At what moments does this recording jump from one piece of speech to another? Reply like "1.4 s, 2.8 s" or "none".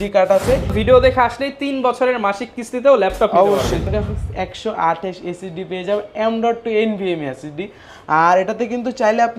0.8 s, 3.8 s

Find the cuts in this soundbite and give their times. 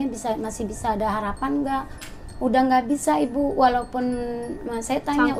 none

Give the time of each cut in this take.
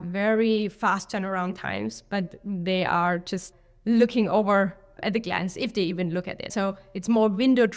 6.5 s

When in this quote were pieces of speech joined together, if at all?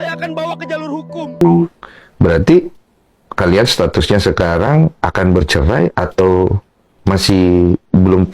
1.4 s

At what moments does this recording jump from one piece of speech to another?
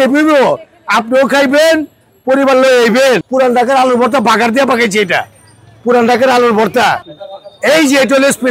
3.3 s, 7.0 s

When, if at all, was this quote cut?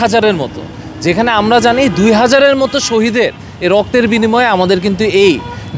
none

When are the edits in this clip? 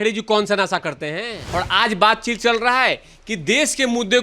1.4 s

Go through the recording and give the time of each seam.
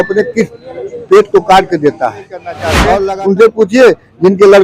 2.8 s

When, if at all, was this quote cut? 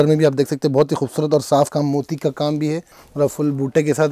3.0 s

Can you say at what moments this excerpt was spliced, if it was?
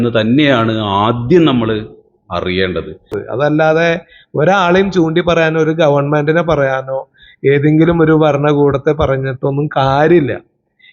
3.2 s

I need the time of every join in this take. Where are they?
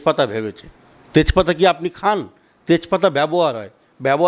none

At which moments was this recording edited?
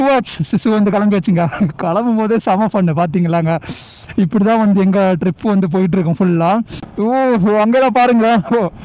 6.8 s

